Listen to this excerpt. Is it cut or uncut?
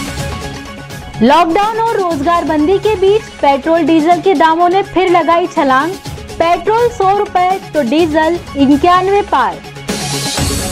uncut